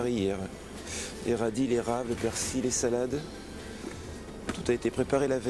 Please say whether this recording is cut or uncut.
uncut